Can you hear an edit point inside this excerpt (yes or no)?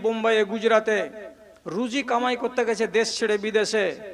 no